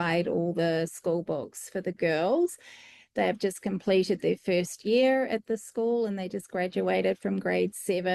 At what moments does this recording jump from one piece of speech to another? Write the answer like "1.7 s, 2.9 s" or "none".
none